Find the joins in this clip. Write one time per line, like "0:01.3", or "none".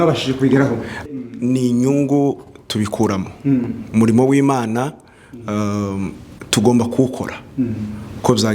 0:01.0